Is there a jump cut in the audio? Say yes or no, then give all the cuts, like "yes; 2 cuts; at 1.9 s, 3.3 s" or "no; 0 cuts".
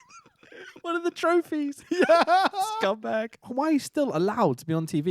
yes; 1 cut; at 3.4 s